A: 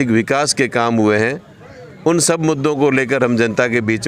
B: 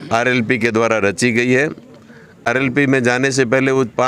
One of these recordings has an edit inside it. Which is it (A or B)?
B